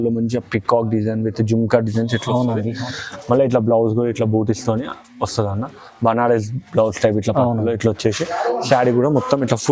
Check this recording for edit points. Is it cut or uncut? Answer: uncut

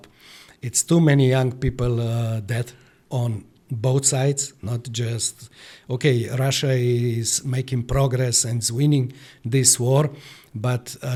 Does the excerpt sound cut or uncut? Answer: uncut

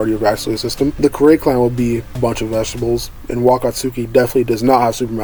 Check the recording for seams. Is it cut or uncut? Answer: uncut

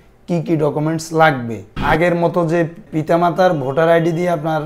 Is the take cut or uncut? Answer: cut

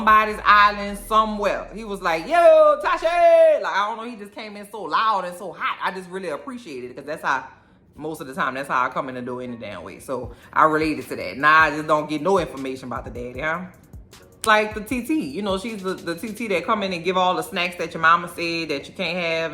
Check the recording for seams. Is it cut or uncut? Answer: cut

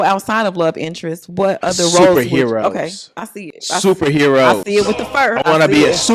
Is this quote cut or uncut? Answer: uncut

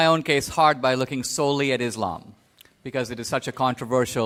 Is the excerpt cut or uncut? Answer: uncut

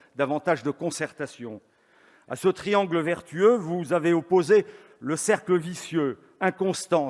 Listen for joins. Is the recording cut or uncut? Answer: uncut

